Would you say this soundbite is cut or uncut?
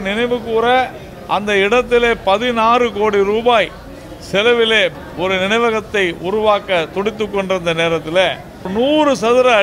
cut